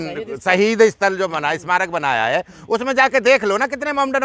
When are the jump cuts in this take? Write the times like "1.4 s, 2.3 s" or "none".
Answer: none